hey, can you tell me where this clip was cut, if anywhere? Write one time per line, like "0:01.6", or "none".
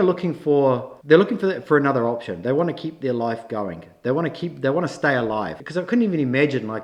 0:00.9
0:05.6